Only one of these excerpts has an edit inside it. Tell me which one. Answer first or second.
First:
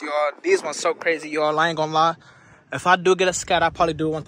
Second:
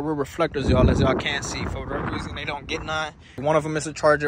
second